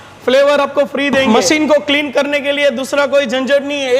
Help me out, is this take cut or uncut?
cut